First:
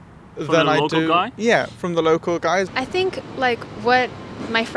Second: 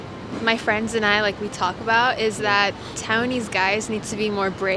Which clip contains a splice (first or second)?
first